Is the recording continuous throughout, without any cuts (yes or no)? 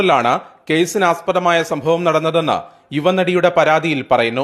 yes